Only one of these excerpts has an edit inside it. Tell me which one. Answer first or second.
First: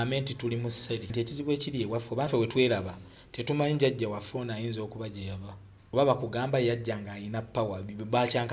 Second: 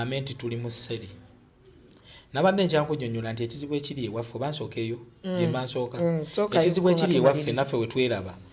first